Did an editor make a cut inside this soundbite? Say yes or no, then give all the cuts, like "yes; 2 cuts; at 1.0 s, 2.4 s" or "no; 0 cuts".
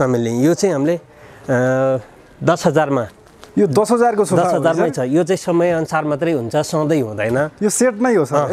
no; 0 cuts